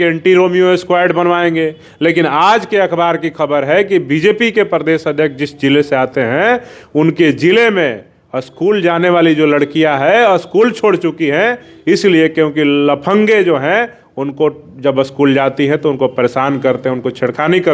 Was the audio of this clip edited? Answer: no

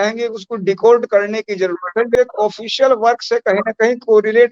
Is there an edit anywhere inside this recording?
yes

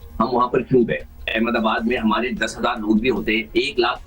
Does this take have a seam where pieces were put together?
yes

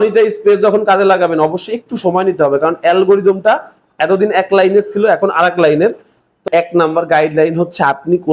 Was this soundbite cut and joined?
yes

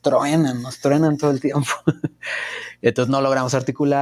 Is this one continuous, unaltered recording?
yes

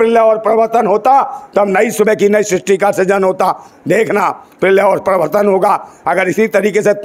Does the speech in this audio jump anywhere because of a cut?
no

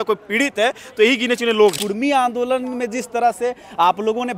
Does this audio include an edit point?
yes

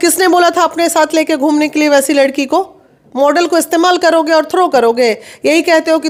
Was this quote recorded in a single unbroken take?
yes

